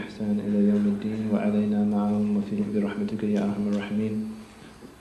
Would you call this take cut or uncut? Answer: uncut